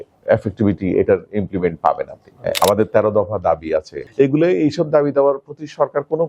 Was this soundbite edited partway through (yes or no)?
yes